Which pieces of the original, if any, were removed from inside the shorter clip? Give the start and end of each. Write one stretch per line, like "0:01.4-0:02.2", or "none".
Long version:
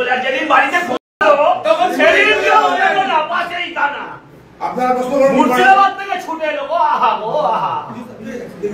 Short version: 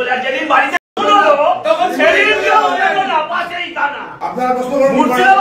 0:04.1-0:04.5